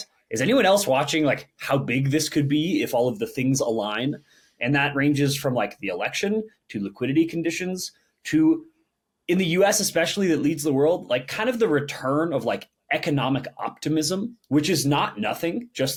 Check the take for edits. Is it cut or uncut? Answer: uncut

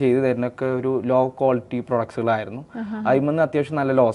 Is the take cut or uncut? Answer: uncut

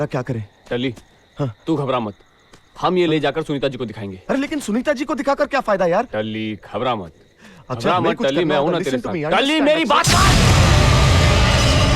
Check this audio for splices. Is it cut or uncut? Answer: uncut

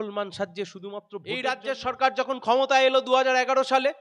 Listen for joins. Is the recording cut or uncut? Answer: cut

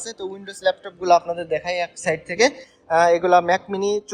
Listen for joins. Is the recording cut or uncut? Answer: cut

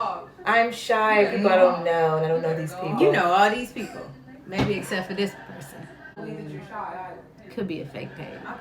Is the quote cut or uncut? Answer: cut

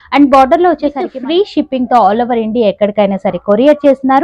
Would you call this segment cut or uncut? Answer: cut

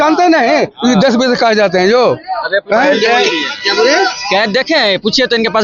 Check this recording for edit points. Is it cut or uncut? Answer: uncut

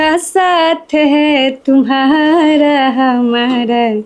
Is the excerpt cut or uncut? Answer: uncut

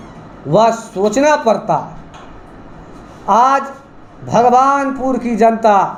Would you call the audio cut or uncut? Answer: uncut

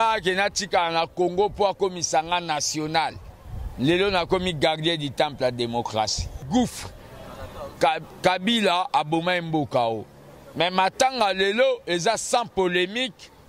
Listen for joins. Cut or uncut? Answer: cut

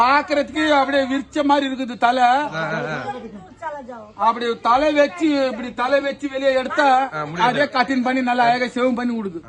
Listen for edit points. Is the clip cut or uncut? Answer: uncut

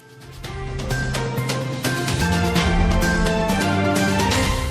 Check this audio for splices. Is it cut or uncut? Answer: cut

